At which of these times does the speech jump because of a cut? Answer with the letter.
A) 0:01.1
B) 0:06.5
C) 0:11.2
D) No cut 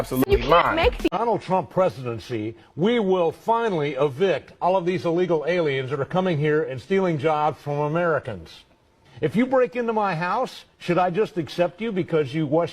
A